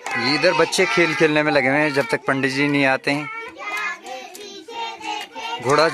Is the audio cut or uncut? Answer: uncut